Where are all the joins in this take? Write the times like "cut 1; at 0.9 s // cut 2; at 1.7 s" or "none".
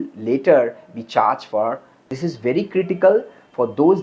cut 1; at 2.1 s